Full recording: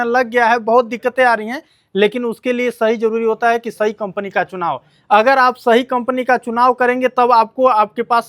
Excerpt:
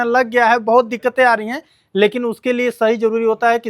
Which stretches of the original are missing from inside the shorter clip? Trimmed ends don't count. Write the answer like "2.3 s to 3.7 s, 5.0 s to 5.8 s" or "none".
none